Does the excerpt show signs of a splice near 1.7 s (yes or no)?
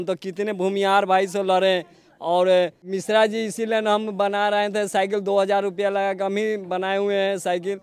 no